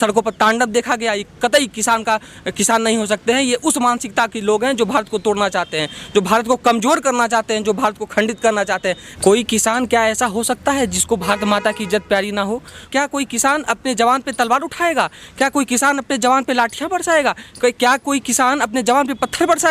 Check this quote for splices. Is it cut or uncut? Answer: cut